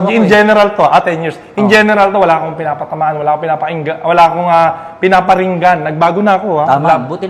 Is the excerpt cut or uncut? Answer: uncut